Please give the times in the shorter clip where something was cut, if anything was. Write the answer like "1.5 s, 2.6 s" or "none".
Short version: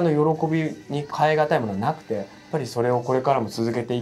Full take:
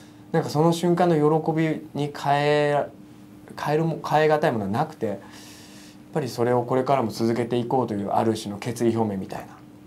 1.1 s, 2.3 s